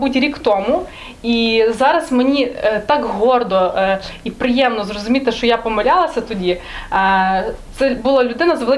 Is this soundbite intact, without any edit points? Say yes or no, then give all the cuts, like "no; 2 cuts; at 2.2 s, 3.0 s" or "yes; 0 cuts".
yes; 0 cuts